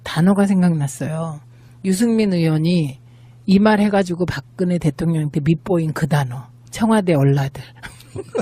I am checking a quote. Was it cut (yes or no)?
yes